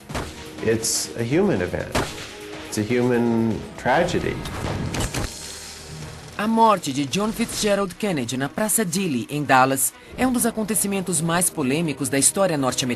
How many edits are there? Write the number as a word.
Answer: one